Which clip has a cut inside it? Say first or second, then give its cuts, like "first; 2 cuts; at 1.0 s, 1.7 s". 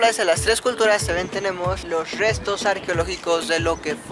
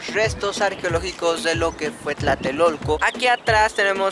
second; 1 cut; at 3.0 s